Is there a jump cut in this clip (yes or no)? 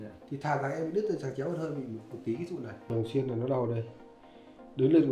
yes